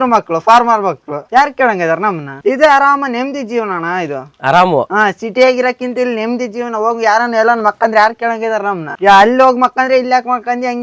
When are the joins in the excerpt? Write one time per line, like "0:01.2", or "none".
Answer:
none